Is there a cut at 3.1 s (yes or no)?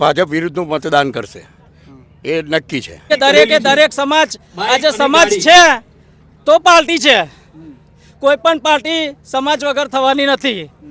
yes